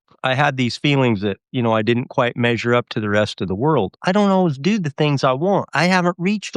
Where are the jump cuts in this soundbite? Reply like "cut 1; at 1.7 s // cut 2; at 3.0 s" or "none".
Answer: cut 1; at 3.9 s